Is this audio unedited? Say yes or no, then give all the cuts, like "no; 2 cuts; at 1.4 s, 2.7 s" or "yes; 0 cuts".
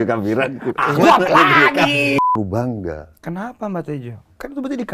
no; 1 cut; at 2.2 s